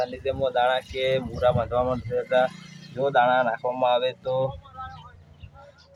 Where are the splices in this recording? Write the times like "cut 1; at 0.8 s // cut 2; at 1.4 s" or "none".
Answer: none